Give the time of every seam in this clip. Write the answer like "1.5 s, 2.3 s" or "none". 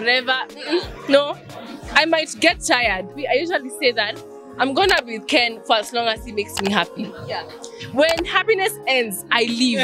3.1 s